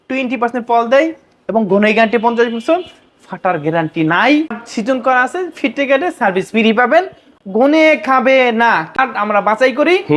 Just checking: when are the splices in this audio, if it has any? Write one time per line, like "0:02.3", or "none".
0:04.5
0:08.9